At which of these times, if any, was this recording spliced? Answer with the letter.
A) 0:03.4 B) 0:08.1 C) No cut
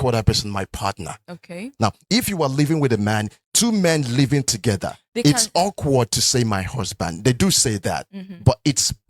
C